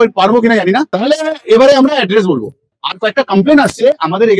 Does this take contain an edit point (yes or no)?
yes